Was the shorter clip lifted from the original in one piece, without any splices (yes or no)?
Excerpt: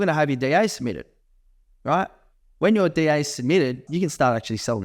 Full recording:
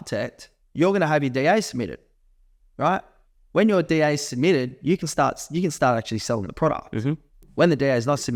no